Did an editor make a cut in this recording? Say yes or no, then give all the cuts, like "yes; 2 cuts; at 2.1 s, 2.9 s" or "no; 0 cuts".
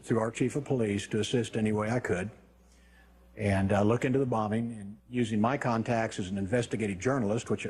yes; 1 cut; at 4.3 s